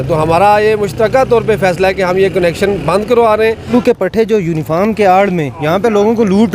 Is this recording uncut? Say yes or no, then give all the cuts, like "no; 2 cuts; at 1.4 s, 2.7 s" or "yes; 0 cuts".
no; 1 cut; at 3.7 s